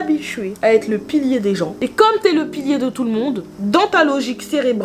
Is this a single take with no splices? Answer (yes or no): no